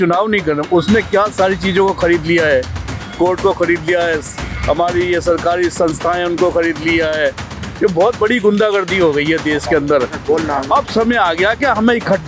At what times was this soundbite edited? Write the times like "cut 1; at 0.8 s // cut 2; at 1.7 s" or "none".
none